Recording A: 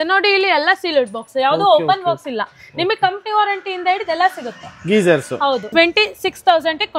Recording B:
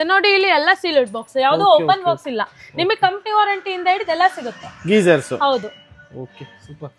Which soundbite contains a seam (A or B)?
A